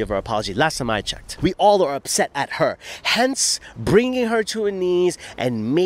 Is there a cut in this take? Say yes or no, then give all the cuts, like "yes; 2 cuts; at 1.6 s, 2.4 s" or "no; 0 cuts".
yes; 1 cut; at 1.2 s